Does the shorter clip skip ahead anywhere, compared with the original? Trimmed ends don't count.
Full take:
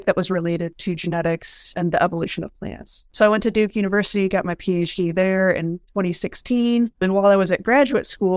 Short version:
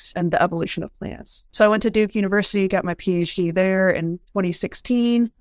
no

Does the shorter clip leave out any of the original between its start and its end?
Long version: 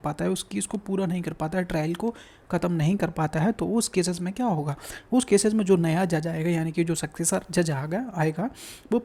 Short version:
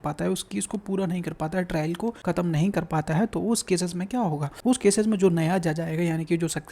yes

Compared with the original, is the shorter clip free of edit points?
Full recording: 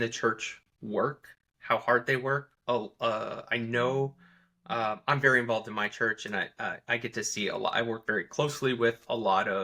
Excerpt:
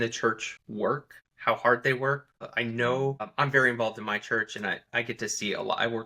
no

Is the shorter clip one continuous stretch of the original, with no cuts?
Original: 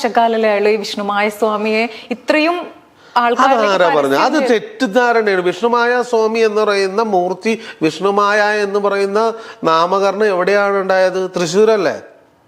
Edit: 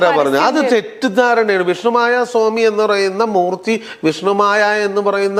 yes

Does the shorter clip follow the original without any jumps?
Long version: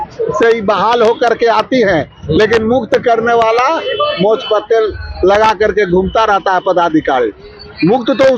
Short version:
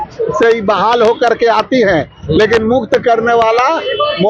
yes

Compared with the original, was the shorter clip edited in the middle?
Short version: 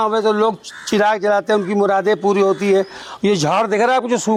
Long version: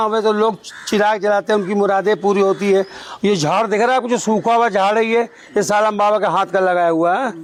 no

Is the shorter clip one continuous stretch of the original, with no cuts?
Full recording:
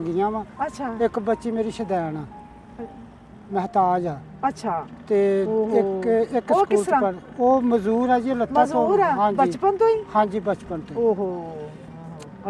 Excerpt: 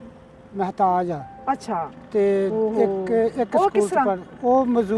yes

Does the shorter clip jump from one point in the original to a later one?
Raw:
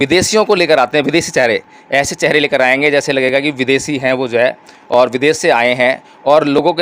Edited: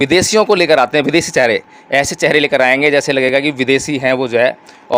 no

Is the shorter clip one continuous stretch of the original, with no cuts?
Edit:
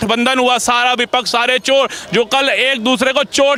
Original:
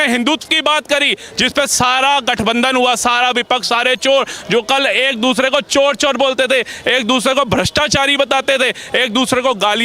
yes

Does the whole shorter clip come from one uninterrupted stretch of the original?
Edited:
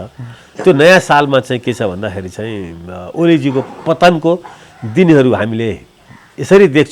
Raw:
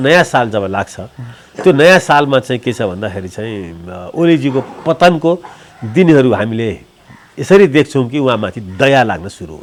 yes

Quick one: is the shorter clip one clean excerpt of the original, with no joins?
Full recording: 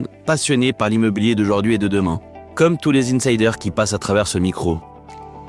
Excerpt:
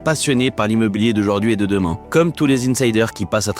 no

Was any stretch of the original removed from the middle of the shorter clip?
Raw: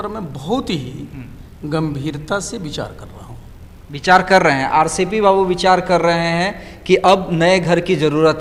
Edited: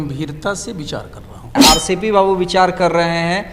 yes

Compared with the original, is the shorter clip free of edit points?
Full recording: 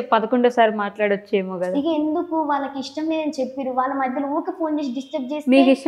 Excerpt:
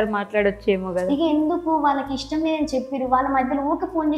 yes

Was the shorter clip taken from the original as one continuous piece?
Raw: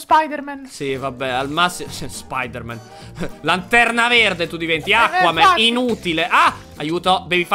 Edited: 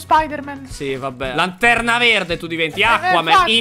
no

